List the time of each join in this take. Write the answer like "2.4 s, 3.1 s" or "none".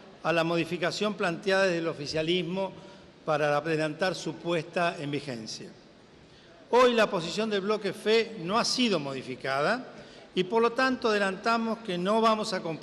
10.2 s